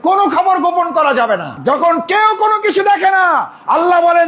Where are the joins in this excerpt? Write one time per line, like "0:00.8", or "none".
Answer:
0:01.5